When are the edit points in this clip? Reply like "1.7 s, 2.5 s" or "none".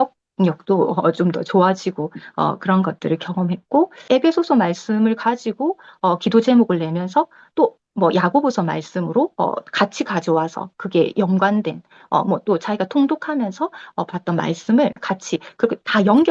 4.0 s